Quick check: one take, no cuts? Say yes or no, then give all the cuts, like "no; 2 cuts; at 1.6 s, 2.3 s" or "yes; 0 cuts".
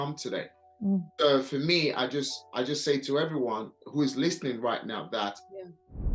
yes; 0 cuts